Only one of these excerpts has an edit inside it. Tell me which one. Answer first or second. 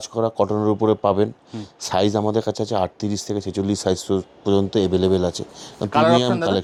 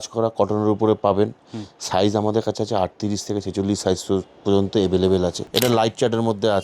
second